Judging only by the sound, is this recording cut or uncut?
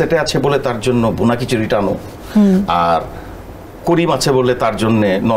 uncut